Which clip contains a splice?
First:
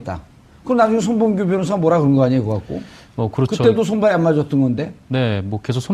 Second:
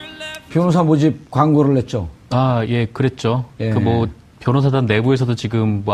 first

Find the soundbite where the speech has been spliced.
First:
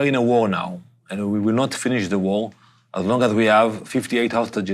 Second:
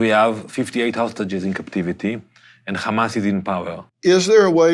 second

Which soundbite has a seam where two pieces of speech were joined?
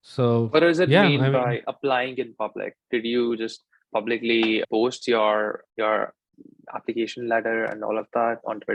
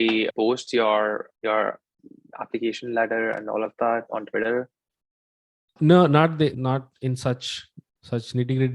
second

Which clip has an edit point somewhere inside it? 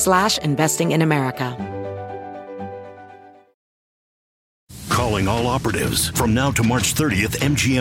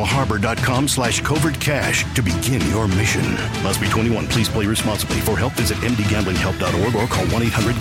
first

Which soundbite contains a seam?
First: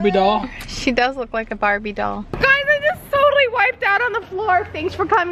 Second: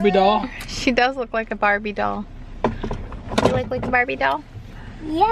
first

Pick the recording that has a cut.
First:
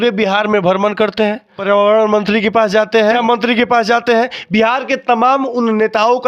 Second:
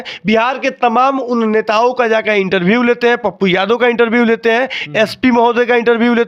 first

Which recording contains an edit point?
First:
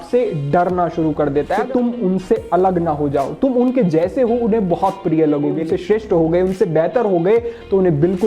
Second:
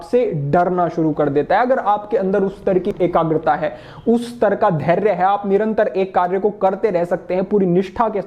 first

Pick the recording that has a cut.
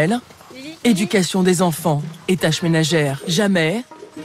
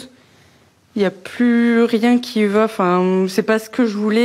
first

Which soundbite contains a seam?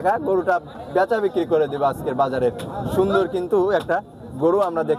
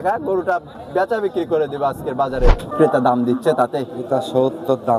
second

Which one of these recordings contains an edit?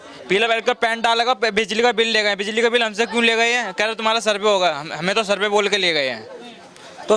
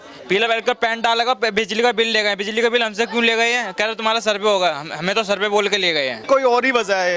second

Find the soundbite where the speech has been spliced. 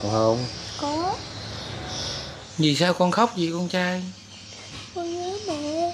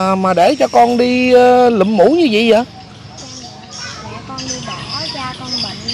first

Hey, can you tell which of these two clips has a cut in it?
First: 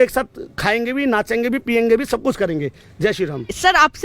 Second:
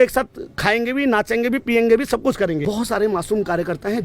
second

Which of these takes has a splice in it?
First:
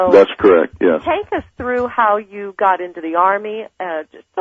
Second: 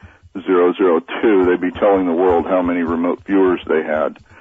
first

